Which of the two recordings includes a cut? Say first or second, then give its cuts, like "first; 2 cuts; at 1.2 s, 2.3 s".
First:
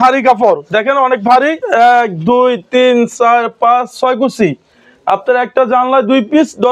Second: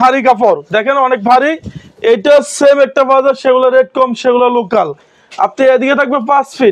first; 1 cut; at 1.6 s